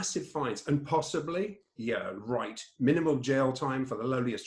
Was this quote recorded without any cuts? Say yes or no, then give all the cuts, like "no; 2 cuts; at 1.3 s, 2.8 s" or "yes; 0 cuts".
yes; 0 cuts